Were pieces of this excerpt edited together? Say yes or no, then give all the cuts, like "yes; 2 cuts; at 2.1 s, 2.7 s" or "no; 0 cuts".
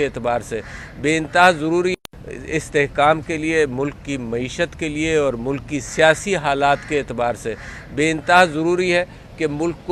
no; 0 cuts